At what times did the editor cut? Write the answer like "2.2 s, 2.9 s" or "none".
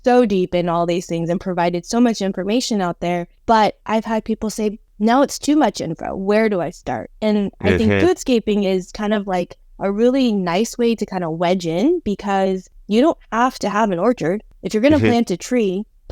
3.3 s, 4.9 s, 12.7 s